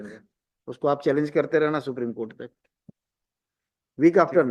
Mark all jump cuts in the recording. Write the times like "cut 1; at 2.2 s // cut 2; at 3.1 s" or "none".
none